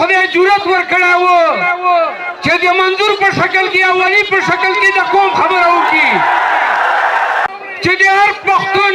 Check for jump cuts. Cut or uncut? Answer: cut